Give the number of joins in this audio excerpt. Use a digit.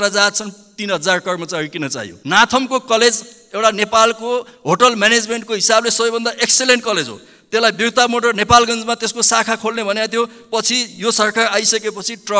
1